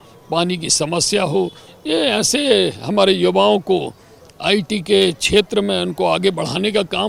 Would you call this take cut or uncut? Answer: uncut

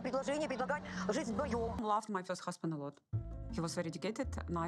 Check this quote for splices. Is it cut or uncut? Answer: cut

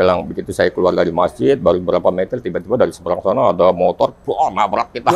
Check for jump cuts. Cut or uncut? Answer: uncut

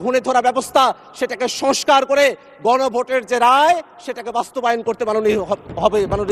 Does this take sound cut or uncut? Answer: uncut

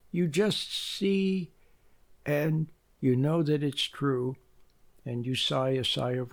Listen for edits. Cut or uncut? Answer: uncut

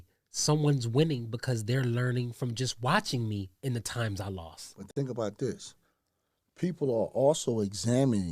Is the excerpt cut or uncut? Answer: uncut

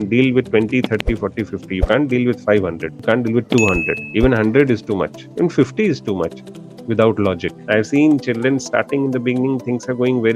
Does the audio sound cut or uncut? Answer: cut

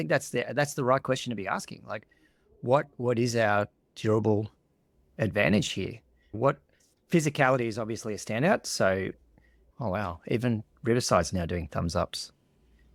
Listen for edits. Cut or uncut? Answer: uncut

